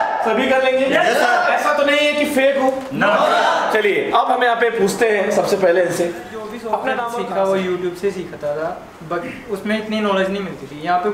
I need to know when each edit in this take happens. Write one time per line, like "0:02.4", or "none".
0:07.2